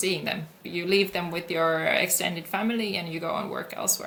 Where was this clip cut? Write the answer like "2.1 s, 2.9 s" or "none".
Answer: none